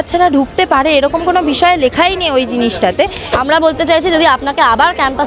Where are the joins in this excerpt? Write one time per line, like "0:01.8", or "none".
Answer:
0:03.2